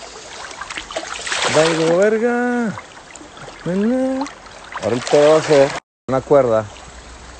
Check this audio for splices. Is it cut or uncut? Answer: cut